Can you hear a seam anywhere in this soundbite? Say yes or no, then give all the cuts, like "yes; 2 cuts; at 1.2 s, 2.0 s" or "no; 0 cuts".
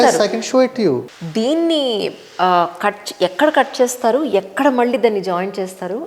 yes; 1 cut; at 1.2 s